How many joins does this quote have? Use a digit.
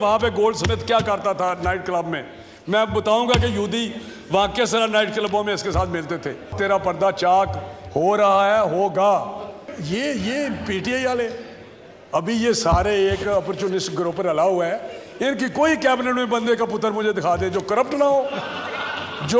2